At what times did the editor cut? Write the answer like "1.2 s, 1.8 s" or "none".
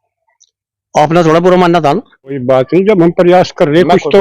2.4 s

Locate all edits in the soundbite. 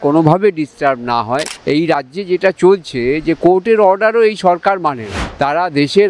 1.5 s, 5.1 s

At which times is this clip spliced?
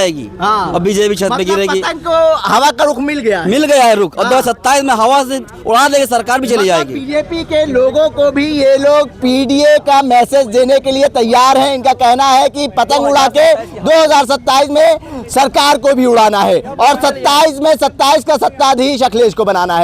none

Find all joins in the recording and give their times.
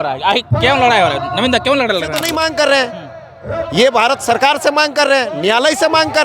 2.2 s

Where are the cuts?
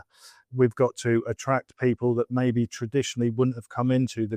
none

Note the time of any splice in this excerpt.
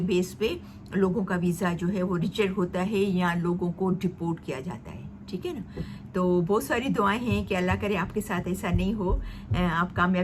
none

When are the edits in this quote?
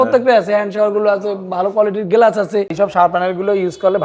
2.7 s

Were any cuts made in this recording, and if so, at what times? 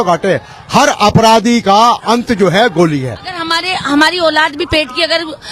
3.4 s

